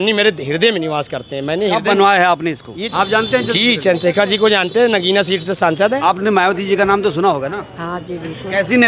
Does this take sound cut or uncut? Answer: cut